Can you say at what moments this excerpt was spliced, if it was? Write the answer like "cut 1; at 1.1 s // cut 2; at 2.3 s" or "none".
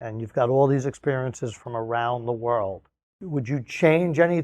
cut 1; at 3.2 s